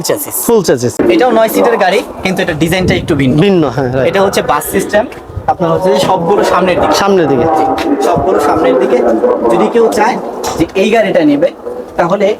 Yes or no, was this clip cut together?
yes